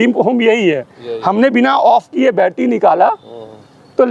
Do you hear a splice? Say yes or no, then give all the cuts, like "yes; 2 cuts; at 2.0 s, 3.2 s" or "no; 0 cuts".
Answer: no; 0 cuts